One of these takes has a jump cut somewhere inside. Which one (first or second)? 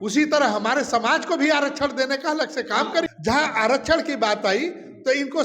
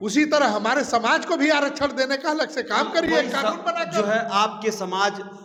first